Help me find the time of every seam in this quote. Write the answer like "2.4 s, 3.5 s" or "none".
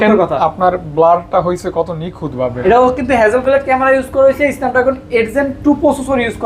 2.6 s